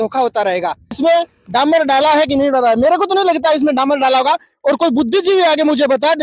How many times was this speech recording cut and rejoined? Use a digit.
1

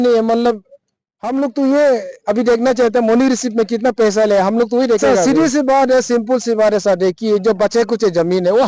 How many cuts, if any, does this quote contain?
1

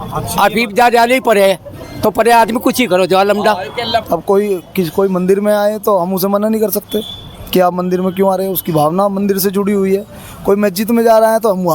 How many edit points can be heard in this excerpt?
1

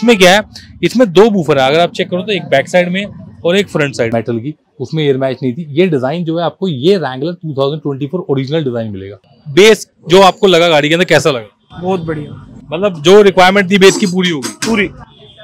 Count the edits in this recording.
2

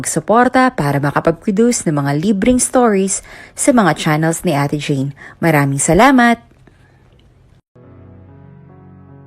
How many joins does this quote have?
1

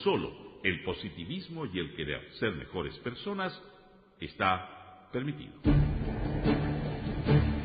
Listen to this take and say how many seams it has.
1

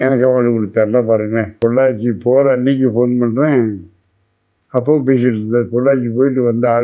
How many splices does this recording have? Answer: 1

